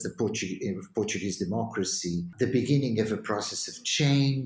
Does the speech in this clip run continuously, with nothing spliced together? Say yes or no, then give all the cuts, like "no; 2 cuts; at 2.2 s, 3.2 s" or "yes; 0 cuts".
no; 1 cut; at 2.3 s